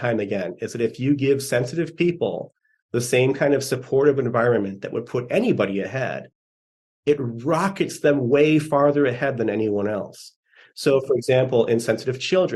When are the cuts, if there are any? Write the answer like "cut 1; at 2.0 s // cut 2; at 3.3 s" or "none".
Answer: none